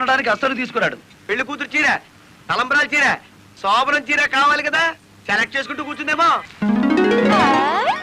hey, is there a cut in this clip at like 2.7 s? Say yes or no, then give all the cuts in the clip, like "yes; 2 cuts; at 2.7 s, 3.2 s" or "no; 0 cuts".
no; 2 cuts; at 1.2 s, 6.5 s